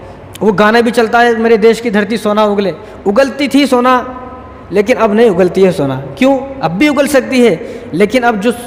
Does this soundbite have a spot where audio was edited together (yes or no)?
no